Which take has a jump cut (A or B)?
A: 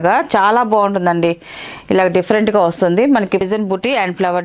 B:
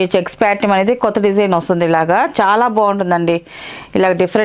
A